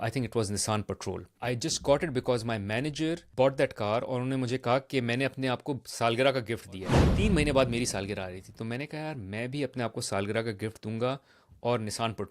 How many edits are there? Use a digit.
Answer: 3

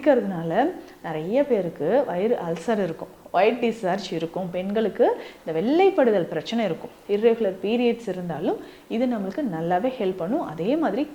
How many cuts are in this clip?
0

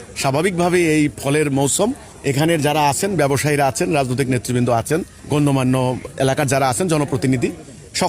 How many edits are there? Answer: 3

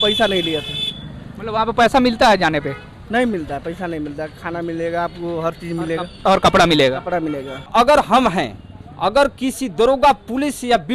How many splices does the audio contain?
1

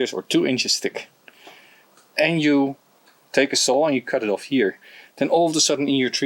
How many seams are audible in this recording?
0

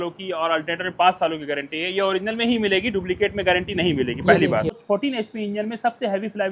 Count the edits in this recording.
1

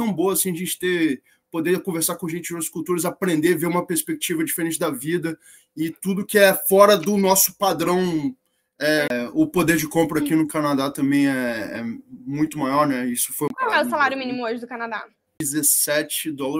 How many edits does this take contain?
3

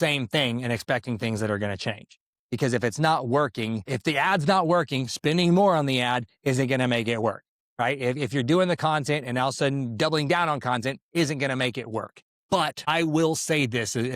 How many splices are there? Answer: 2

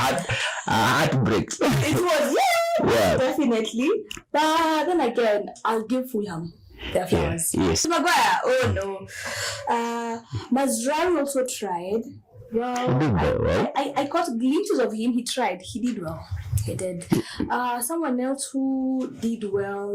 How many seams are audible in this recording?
1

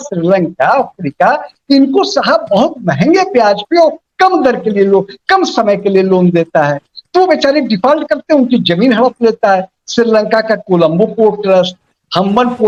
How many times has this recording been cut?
0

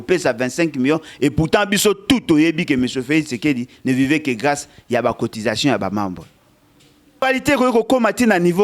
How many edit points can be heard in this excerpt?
1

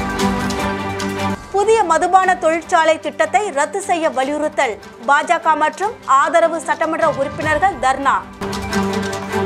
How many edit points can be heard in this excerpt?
1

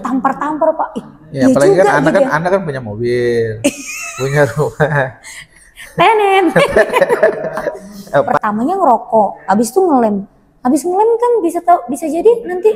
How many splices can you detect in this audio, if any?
1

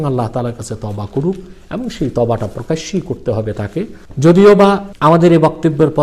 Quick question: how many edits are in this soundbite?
2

